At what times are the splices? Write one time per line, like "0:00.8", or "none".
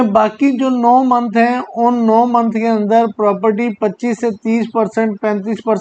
none